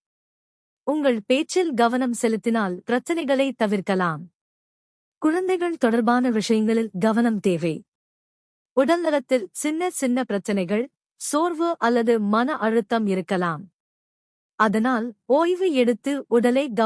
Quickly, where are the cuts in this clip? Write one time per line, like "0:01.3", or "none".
none